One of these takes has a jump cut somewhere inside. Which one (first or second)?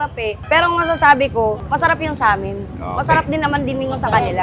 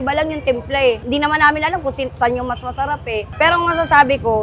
second